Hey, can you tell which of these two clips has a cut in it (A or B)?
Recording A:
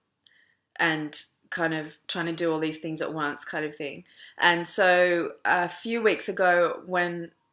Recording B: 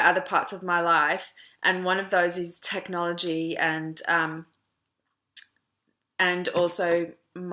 B